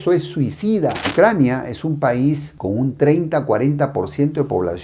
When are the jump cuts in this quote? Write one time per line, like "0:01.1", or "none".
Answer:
0:01.1